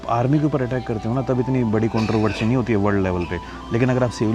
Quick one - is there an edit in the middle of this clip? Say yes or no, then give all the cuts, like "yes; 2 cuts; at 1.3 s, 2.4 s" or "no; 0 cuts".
no; 0 cuts